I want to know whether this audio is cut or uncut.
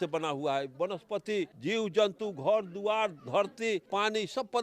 cut